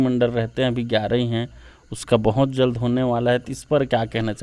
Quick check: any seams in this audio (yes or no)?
no